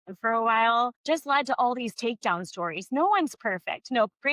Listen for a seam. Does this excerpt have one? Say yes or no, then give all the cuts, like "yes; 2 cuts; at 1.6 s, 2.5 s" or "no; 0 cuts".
yes; 1 cut; at 1.0 s